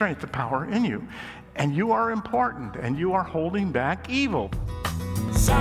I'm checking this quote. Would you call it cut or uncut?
cut